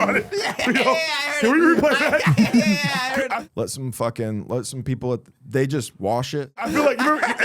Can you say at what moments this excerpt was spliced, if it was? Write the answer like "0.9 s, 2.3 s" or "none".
3.3 s, 6.6 s